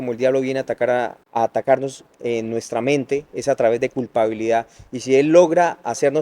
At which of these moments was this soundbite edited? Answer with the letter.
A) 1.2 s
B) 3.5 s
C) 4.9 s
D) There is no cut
A